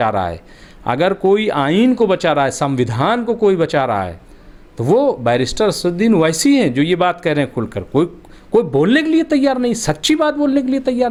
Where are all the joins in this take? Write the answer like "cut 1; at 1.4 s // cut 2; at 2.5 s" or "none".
none